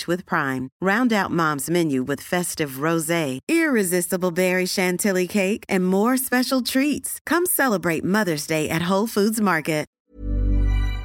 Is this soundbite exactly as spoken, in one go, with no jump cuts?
no; 1 cut; at 9.9 s

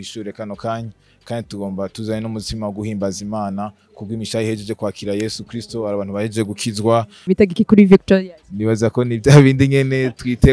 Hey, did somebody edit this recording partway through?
yes; 1 cut; at 7.3 s

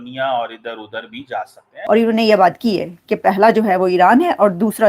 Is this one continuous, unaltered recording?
no; 1 cut; at 1.7 s

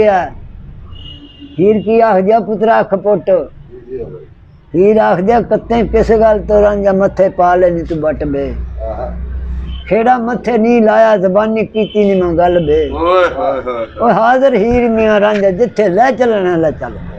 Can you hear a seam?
no; 0 cuts

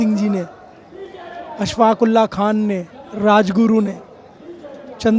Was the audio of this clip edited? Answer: no; 0 cuts

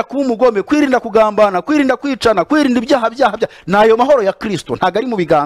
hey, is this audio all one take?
yes; 0 cuts

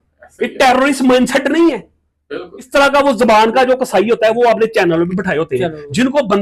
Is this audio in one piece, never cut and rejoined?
no; 1 cut; at 2.6 s

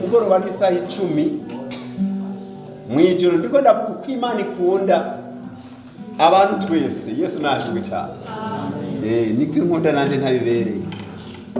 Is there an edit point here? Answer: no; 0 cuts

